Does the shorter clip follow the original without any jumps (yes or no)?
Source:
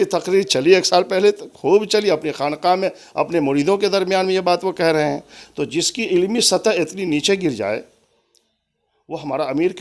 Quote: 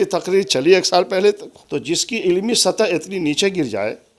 no